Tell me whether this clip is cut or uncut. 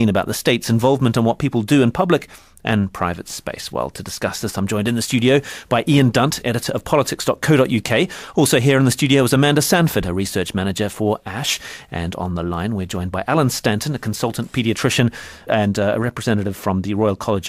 cut